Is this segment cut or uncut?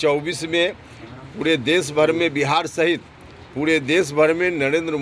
uncut